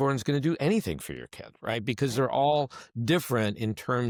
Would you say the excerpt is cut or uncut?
uncut